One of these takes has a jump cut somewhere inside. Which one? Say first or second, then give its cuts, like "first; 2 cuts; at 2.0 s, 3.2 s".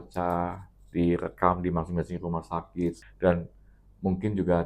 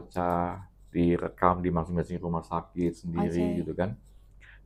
first; 1 cut; at 3.0 s